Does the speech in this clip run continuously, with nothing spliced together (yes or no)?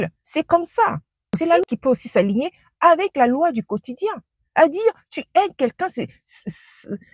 no